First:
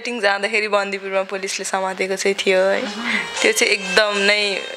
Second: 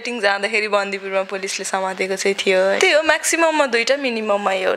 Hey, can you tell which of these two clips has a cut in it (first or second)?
second